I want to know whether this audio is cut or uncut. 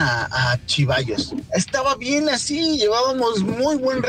cut